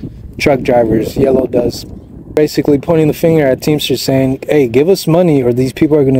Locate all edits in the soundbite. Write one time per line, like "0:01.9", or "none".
0:02.4